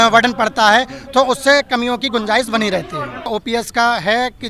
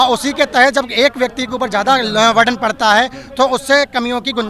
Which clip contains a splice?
first; 1 cut; at 3.3 s

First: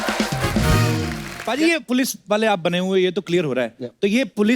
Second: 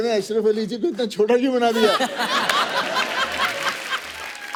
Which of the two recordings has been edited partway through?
first; 1 cut; at 1.4 s

